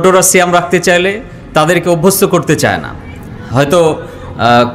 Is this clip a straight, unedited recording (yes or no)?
yes